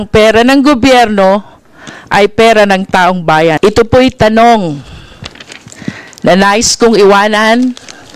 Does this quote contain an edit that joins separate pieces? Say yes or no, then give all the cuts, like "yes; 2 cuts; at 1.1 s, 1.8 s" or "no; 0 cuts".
yes; 1 cut; at 3.6 s